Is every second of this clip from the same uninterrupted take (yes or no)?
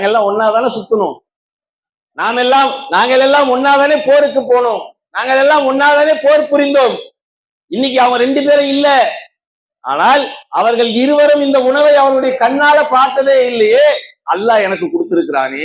yes